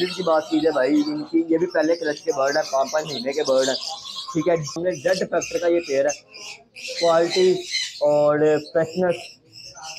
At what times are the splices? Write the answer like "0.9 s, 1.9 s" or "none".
4.8 s